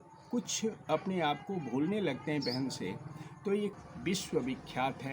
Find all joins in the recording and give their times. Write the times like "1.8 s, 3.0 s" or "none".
3.8 s